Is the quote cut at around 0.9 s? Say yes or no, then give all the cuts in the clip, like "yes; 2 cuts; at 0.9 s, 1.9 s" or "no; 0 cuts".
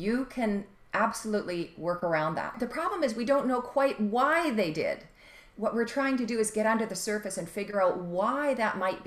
no; 1 cut; at 2.5 s